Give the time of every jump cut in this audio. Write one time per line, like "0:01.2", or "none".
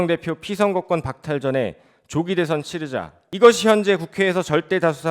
0:03.2